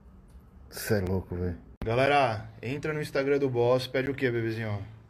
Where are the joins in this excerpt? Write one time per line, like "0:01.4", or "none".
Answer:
0:01.8